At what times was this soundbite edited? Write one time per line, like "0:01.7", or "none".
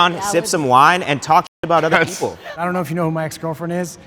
0:02.5